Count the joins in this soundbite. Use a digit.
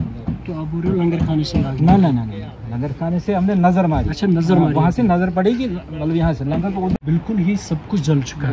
1